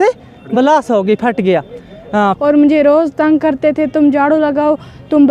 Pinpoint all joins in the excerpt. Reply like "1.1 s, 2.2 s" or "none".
2.4 s